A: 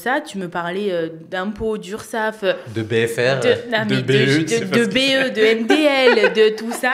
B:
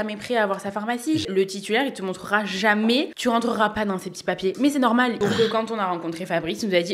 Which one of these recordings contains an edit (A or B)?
B